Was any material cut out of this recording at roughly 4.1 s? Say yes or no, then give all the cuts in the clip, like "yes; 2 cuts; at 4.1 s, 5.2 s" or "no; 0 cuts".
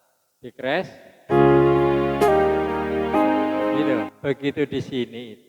yes; 1 cut; at 4.1 s